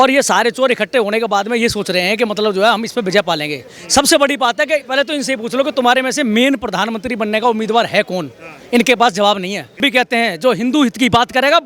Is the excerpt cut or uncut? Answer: cut